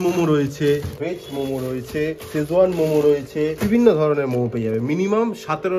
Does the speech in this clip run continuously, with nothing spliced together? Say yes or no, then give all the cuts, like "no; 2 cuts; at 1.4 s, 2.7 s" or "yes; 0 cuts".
no; 3 cuts; at 0.9 s, 2.2 s, 3.6 s